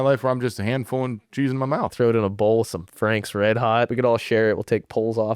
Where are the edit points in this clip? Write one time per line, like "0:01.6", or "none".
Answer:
0:01.9
0:03.9